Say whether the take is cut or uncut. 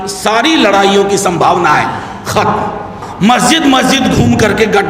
cut